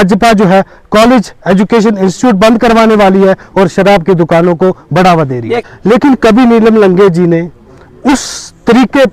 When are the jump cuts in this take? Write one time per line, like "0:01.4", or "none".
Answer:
0:05.6

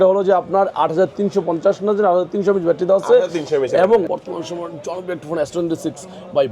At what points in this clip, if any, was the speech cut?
0:04.1

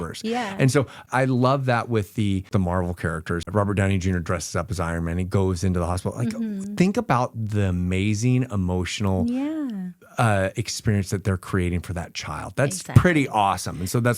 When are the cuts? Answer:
0:01.1
0:02.5
0:03.4

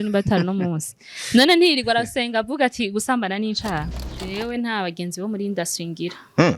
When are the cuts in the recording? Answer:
0:04.1

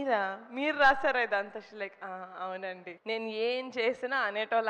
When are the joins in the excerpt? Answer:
0:02.9

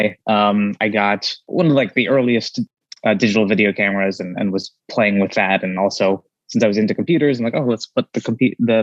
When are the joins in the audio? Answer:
0:01.4
0:02.6

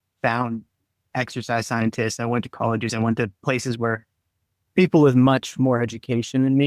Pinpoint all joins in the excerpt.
none

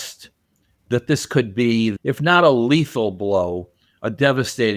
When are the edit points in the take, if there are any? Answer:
0:02.0

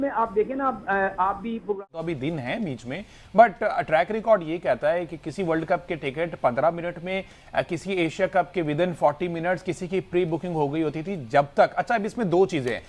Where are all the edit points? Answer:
0:01.8

